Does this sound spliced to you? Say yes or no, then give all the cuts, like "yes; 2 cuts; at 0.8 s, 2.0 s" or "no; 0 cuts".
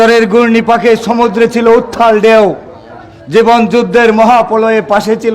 no; 0 cuts